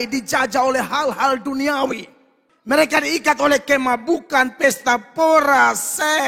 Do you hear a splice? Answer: no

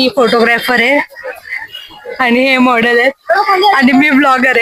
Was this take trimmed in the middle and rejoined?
no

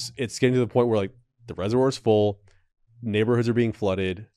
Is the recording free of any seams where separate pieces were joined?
yes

